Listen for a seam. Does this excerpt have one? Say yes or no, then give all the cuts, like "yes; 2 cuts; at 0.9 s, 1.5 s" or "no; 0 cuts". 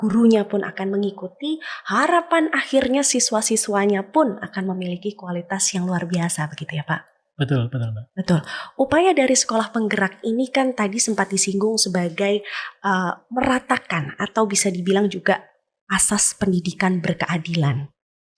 no; 0 cuts